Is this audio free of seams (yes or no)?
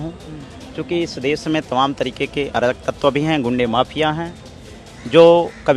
yes